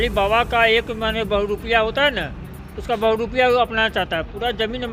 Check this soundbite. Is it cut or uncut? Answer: uncut